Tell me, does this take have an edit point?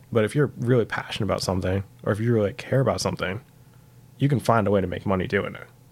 no; 0 cuts

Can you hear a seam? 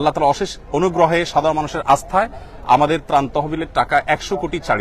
no; 0 cuts

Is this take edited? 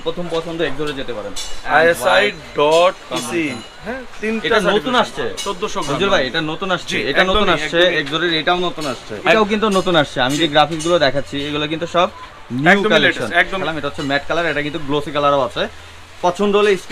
yes; 3 cuts; at 1.6 s, 9.3 s, 13.6 s

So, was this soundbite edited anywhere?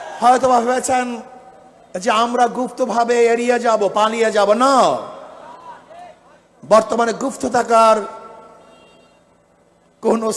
no; 0 cuts

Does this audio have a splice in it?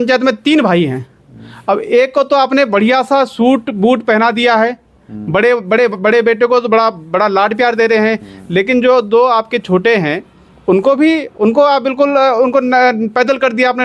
no; 0 cuts

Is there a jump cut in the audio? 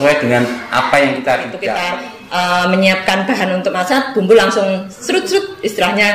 yes; 1 cut; at 1.7 s

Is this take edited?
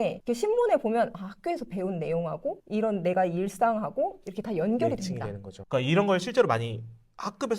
yes; 1 cut; at 5.5 s

